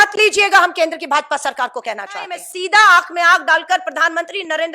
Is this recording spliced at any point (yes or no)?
yes